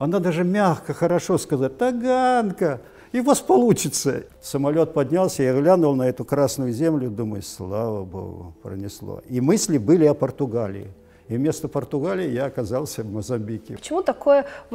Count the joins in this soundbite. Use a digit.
2